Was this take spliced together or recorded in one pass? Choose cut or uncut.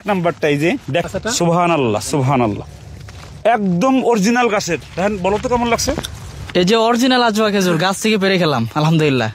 cut